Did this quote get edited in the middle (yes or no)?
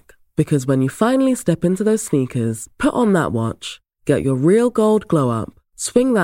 no